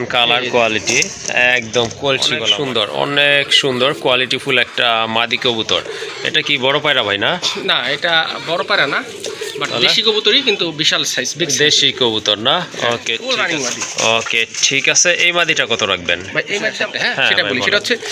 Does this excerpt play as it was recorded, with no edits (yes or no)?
no